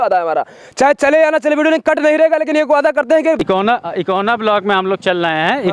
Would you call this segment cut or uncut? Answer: cut